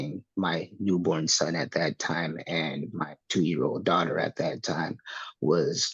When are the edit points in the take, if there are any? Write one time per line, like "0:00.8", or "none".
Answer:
none